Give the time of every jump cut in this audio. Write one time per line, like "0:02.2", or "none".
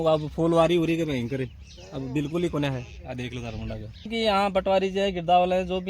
0:04.1